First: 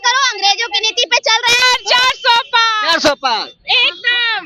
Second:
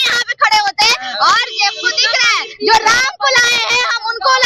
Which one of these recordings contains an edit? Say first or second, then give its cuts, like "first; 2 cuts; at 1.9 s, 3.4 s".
first; 1 cut; at 1.6 s